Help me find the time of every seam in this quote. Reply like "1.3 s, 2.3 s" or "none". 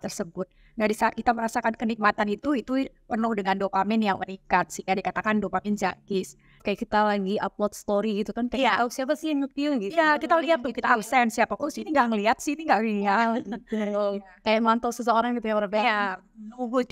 6.5 s